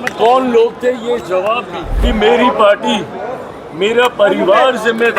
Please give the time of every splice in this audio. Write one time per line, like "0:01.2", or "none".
0:02.0